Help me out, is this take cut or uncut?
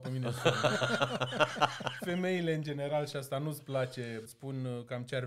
cut